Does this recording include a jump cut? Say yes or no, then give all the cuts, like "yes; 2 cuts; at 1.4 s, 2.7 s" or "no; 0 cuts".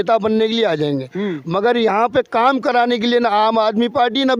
no; 0 cuts